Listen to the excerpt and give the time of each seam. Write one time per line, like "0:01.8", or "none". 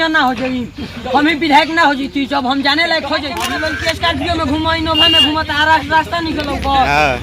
0:03.4